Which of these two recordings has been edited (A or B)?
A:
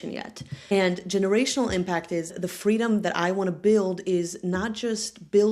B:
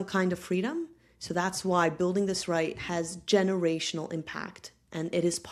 A